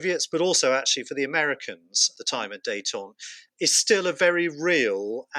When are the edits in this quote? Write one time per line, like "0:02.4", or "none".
0:02.2